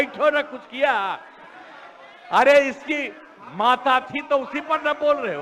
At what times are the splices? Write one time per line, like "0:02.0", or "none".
none